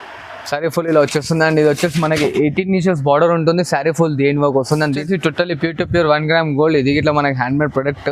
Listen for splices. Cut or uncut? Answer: cut